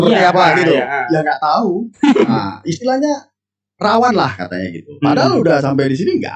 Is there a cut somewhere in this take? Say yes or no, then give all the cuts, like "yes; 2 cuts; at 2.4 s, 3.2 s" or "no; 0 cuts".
yes; 1 cut; at 2.3 s